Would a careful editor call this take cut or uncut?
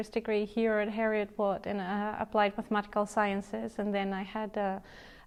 uncut